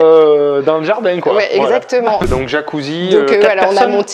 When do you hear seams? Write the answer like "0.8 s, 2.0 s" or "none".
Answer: 2.2 s

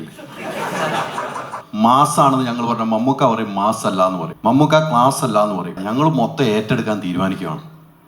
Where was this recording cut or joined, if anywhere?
1.6 s, 4.3 s, 5.8 s

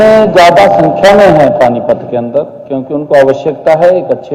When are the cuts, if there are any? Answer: none

